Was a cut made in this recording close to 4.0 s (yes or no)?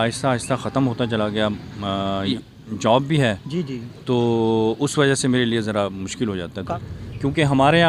no